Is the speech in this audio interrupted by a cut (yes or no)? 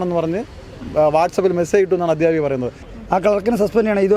yes